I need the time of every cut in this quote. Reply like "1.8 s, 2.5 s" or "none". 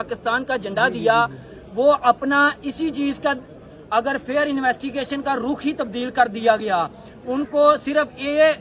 none